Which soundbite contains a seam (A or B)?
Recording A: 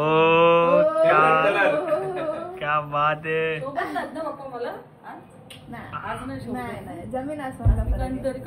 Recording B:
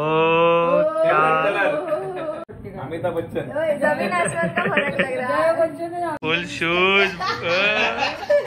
B